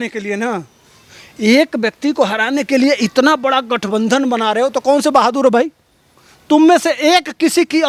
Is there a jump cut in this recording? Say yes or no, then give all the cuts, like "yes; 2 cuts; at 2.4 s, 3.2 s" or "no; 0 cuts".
no; 0 cuts